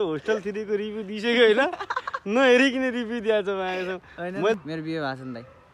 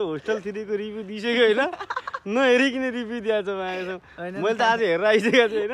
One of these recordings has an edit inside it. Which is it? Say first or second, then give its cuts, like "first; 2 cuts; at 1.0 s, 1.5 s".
first; 1 cut; at 4.6 s